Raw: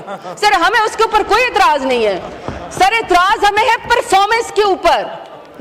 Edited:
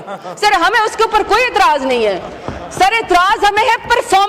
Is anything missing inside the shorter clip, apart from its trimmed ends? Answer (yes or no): no